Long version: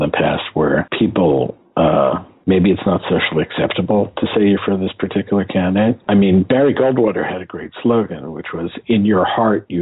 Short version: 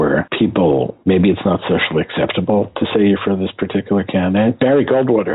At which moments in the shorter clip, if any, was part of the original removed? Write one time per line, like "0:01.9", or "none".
0:00.9
0:04.6